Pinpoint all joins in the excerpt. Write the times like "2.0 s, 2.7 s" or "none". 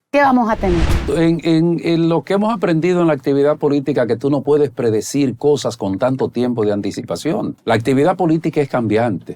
0.9 s, 7.6 s

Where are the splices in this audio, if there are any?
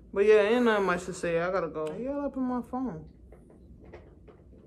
1.9 s

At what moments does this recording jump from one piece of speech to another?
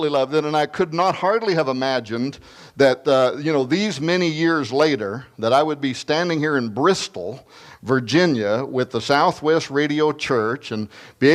9.9 s

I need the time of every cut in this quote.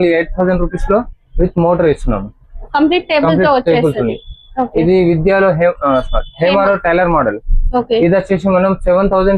none

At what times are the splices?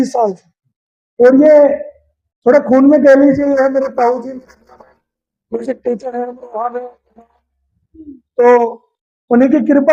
none

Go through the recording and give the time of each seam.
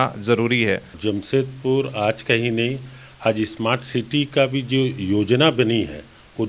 0.9 s

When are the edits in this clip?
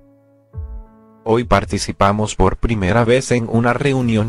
1.2 s

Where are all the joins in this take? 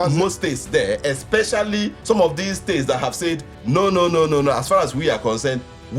2.0 s, 3.5 s

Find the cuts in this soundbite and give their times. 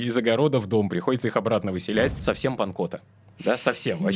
2.2 s

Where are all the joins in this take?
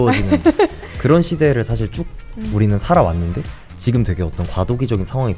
none

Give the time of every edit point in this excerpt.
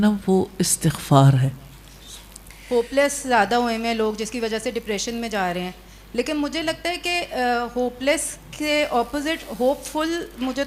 2.5 s

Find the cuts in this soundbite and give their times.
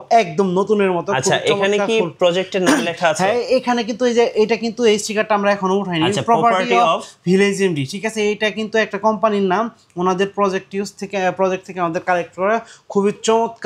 none

